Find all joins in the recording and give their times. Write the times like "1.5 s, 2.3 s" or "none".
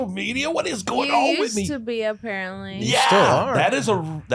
none